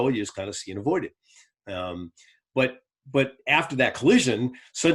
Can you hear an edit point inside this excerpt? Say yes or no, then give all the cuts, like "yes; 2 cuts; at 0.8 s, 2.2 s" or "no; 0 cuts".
no; 0 cuts